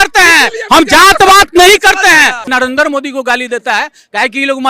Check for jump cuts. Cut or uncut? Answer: cut